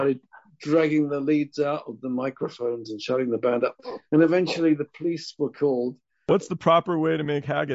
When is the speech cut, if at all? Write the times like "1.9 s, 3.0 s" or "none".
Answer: 6.3 s